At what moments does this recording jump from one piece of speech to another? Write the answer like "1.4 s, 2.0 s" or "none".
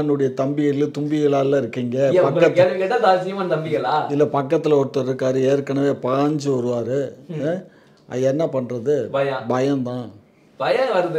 none